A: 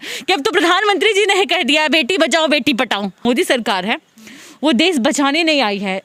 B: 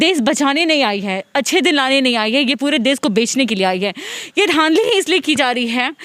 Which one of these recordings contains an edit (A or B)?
A